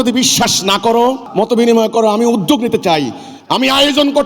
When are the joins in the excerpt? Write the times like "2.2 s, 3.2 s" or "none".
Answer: 1.2 s